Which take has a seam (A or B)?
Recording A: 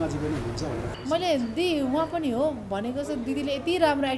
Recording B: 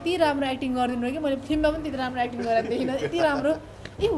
A